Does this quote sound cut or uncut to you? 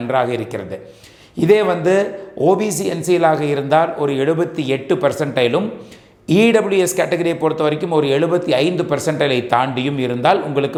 uncut